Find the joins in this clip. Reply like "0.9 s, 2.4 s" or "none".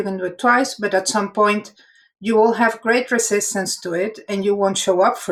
none